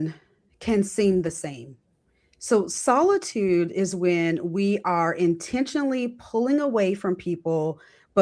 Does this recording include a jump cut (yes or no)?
no